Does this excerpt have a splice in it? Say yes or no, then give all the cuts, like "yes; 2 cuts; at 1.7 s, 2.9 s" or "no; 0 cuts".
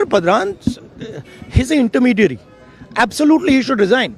no; 0 cuts